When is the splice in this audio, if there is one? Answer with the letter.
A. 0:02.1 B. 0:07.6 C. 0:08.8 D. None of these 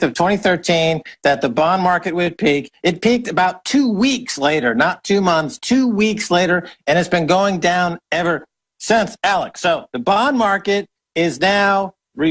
D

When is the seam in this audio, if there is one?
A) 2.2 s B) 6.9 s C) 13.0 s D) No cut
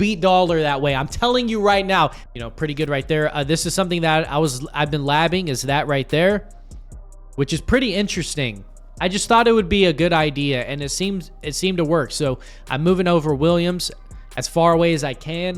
A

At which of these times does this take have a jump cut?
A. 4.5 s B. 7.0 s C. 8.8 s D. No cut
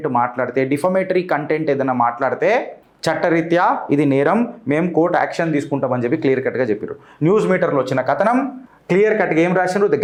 D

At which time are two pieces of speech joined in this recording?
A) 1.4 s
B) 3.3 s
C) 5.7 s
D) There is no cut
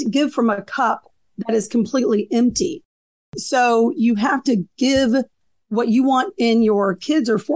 B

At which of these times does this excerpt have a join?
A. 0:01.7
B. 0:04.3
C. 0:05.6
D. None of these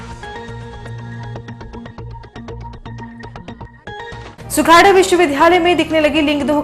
B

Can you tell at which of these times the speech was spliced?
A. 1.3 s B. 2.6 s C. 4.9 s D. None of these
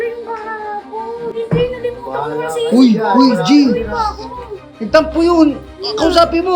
A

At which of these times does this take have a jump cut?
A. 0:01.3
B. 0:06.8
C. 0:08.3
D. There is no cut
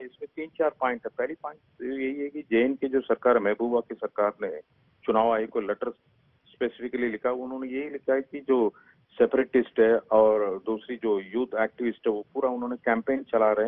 B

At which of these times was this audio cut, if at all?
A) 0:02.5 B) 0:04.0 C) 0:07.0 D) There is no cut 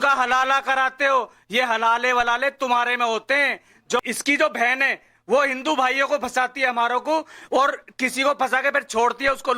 B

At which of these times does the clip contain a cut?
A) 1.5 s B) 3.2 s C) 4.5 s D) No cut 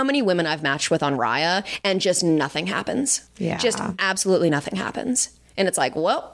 B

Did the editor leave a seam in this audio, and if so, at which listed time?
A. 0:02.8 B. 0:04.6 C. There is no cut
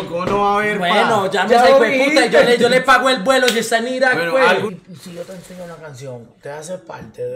B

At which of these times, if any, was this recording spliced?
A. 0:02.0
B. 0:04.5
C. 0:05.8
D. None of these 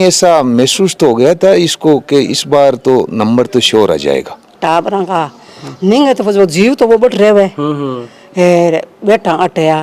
B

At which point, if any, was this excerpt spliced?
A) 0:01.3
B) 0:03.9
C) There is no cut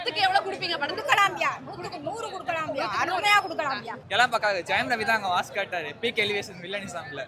C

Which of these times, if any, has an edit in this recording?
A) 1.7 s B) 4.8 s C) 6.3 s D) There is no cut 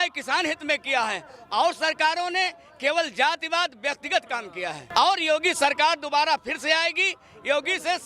B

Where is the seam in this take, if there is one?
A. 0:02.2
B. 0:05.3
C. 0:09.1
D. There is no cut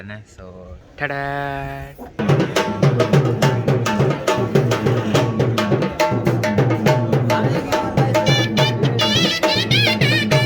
A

